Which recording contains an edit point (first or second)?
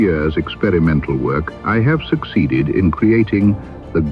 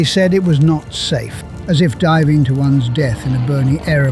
first